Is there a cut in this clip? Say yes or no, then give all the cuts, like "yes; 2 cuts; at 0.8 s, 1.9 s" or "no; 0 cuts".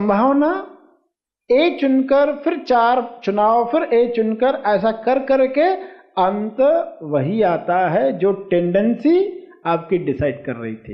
no; 0 cuts